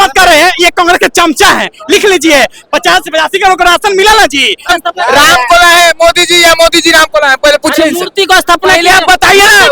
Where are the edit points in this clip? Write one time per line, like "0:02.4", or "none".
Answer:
0:04.7